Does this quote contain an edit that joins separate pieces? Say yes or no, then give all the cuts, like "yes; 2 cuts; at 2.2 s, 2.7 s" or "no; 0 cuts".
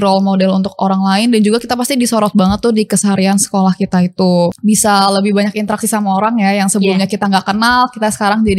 yes; 1 cut; at 4.6 s